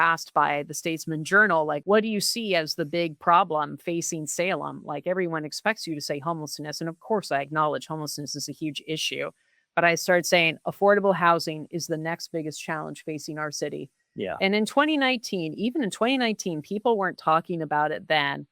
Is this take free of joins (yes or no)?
no